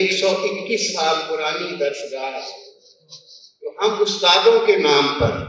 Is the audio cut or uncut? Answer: uncut